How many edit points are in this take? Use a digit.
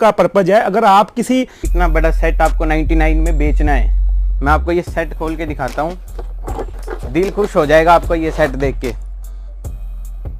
2